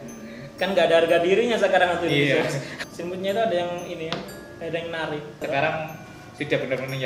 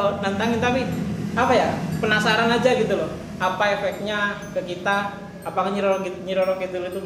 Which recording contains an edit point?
first; 2 cuts; at 2.7 s, 5.4 s

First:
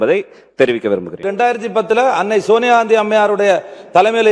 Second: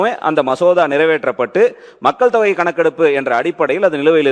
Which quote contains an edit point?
first; 1 cut; at 1.3 s

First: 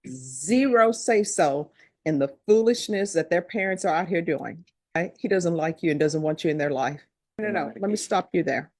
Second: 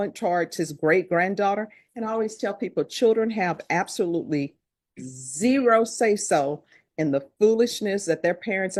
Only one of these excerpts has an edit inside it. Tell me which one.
first; 2 cuts; at 5.0 s, 7.4 s

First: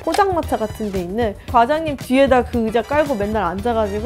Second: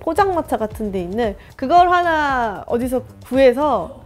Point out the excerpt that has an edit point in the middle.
first; 1 cut; at 1.5 s

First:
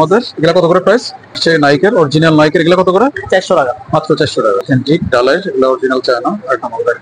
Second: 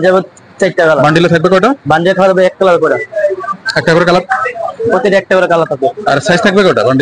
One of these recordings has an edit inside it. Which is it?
first; 2 cuts; at 1.4 s, 4.6 s

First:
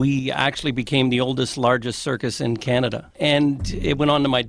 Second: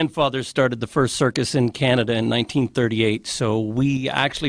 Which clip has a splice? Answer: first; 1 cut; at 3.1 s

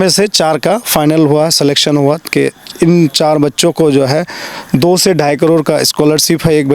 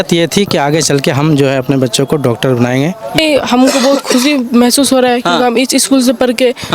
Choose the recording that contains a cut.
second; 1 cut; at 3.0 s

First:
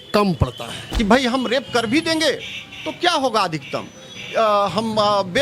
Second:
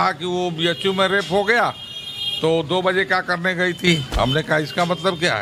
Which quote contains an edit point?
first; 1 cut; at 0.9 s

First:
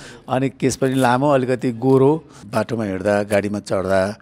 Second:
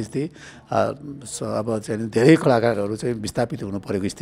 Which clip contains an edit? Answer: first; 1 cut; at 2.4 s

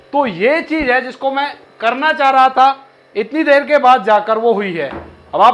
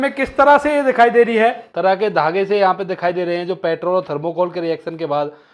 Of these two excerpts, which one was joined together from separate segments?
second; 1 cut; at 1.7 s

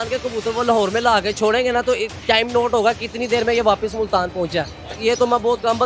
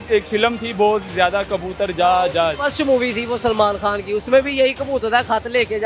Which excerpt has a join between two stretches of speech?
first; 1 cut; at 4.9 s

